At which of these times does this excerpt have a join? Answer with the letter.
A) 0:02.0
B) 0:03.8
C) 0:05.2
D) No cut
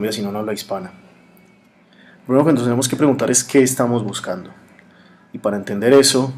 D